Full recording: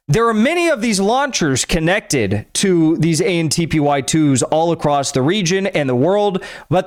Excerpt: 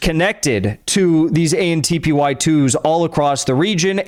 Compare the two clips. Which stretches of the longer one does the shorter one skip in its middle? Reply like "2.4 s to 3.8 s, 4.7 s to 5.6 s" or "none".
none